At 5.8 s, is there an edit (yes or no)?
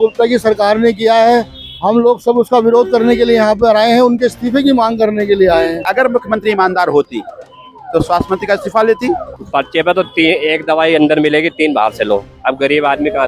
yes